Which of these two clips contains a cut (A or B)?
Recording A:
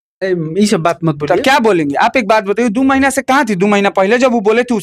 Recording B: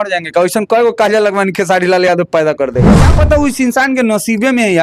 B